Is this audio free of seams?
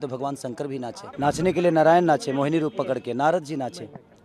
no; 1 cut; at 1.0 s

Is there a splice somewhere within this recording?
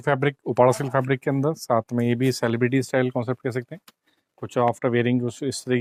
no; 0 cuts

